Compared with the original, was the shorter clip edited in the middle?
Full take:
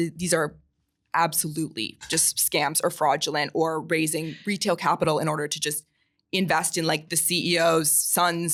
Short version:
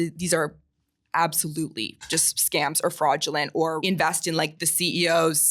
yes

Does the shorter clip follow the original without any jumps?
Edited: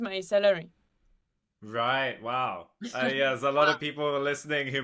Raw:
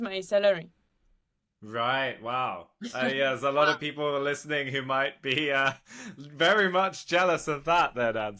yes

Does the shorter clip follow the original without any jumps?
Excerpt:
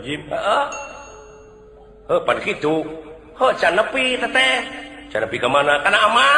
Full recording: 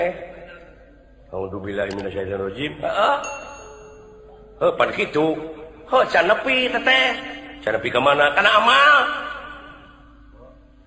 yes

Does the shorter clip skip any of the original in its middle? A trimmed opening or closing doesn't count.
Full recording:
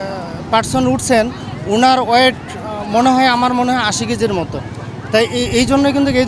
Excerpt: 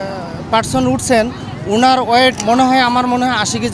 yes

